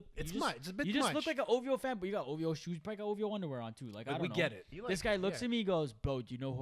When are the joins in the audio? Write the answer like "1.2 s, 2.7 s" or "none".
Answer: 4.7 s